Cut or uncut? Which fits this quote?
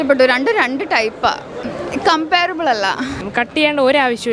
cut